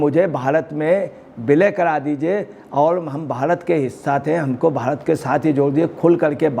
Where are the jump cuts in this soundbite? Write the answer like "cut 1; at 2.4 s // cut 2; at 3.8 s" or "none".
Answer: none